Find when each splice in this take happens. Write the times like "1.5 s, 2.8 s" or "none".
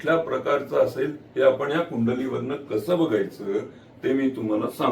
none